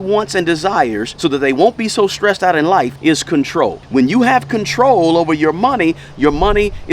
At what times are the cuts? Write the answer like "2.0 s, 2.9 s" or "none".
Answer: 1.1 s, 2.9 s, 3.8 s